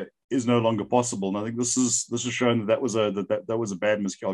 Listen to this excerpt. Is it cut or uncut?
uncut